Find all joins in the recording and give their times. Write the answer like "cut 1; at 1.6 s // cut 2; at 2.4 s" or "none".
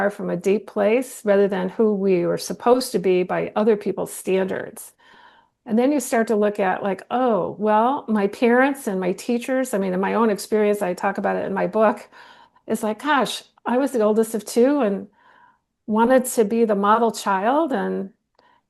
none